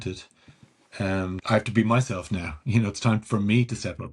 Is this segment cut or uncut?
cut